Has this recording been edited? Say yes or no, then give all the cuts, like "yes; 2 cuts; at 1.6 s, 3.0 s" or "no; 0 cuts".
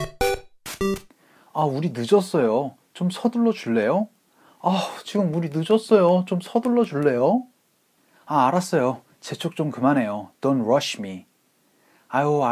yes; 1 cut; at 1.1 s